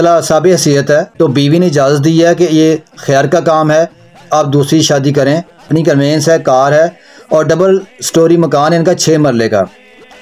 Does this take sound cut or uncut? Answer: cut